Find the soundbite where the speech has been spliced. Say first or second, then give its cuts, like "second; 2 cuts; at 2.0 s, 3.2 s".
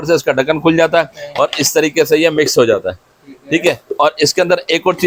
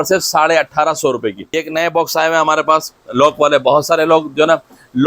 second; 1 cut; at 1.6 s